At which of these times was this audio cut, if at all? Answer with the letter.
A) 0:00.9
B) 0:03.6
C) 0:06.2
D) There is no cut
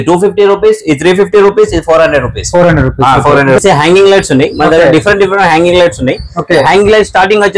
B